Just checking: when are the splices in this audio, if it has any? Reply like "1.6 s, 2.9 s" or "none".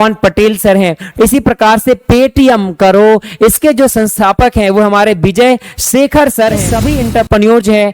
1.0 s, 6.7 s